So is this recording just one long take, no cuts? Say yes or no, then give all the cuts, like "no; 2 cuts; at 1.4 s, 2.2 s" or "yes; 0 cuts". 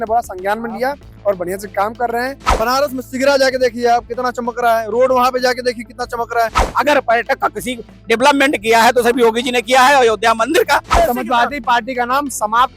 no; 3 cuts; at 2.4 s, 6.6 s, 10.9 s